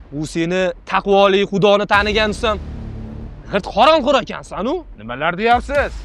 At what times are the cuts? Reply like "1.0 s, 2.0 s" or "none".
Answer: none